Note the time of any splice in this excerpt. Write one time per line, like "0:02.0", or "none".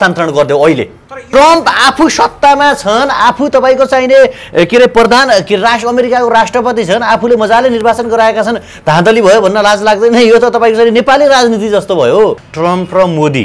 0:01.2
0:12.5